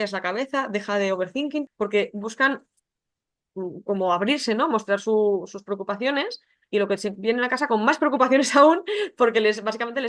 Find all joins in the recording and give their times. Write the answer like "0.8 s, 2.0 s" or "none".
1.7 s